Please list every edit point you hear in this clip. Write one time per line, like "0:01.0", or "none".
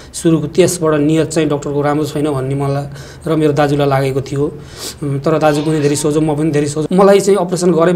0:06.8